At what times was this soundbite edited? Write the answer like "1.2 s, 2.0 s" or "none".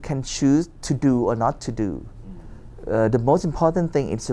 none